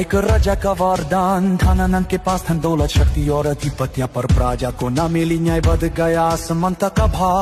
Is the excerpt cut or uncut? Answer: uncut